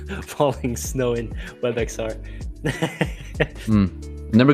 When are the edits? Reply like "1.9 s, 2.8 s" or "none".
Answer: 3.6 s